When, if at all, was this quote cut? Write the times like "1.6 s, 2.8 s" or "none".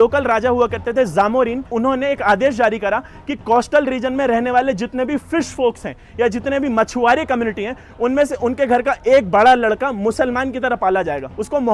1.6 s